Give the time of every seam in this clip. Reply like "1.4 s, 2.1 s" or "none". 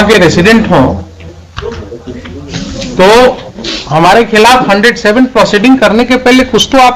none

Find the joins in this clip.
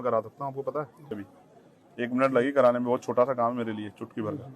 1.2 s

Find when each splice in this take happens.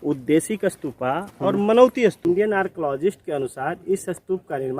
2.2 s

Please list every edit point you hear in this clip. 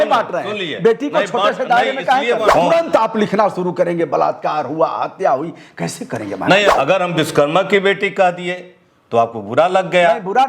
2.5 s, 6.7 s

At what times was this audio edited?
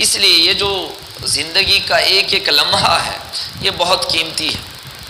none

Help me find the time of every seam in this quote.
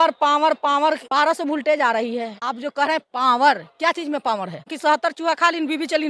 1.0 s, 4.7 s

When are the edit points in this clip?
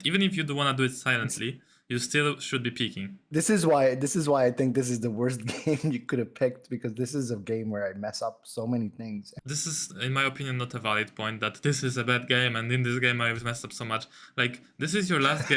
3.2 s, 9.2 s

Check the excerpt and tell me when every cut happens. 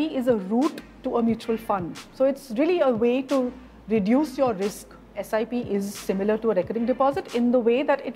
2.0 s, 5.2 s

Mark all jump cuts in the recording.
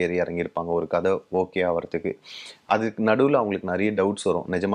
none

